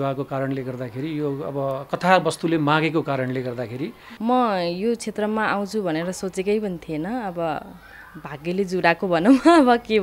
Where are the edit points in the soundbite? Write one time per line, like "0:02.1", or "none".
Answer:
0:04.0